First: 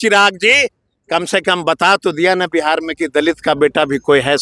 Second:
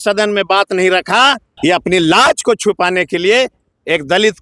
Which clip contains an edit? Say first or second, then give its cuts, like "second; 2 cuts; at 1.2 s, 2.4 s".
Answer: second; 1 cut; at 1.5 s